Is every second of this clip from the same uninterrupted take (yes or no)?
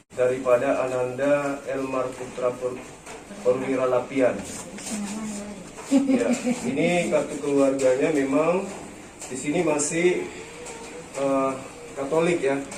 yes